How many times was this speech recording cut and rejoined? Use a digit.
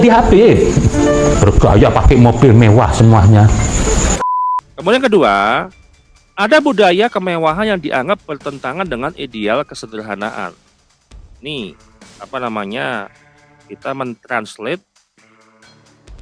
1